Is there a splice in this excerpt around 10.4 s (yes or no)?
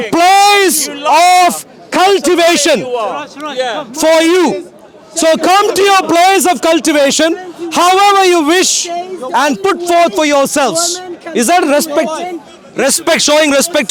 no